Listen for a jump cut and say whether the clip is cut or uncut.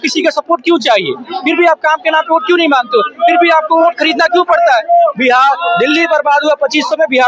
uncut